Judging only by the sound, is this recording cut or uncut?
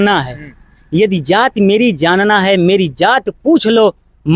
uncut